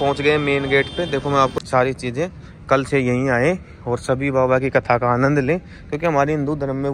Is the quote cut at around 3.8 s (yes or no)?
no